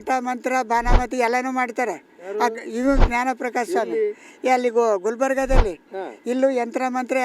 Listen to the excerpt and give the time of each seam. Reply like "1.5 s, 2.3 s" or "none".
none